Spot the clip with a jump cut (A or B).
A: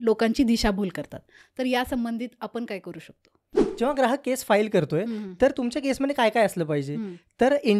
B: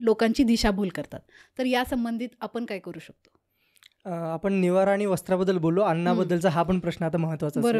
A